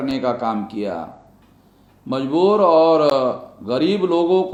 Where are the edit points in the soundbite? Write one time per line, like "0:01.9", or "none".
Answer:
none